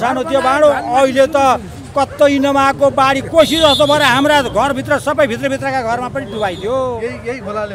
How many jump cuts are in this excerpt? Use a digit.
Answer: 0